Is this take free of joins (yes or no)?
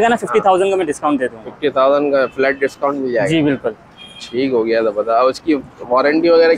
yes